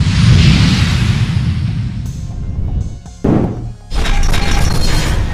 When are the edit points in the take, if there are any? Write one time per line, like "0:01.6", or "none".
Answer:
none